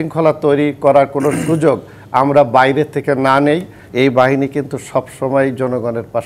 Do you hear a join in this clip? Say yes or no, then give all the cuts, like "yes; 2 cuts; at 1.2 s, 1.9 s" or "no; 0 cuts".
yes; 1 cut; at 3.8 s